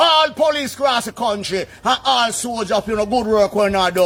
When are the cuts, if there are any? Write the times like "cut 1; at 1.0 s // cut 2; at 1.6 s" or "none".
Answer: none